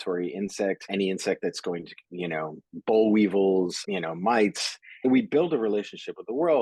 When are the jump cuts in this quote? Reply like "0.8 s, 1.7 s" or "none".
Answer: 0.9 s, 3.8 s, 5.0 s